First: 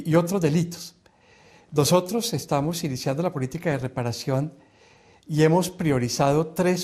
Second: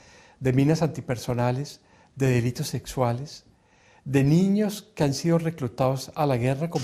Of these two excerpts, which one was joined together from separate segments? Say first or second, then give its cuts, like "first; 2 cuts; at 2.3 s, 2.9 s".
second; 1 cut; at 2.0 s